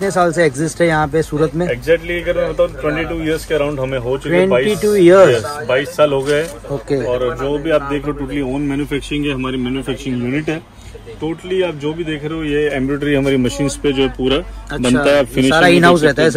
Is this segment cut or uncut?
uncut